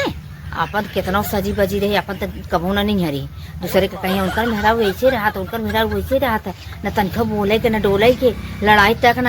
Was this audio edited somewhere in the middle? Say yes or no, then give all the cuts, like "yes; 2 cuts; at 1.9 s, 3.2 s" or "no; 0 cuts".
no; 0 cuts